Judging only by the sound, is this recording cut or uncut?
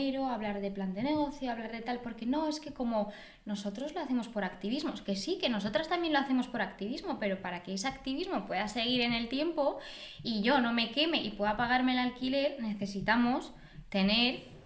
uncut